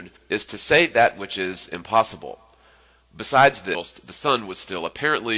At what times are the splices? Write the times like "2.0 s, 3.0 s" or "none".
none